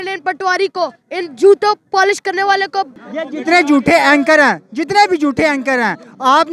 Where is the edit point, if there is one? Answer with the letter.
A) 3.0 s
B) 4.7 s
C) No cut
A